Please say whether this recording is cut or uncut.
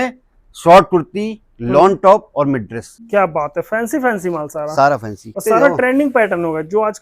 cut